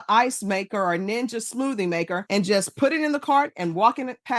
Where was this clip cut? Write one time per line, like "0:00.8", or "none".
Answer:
none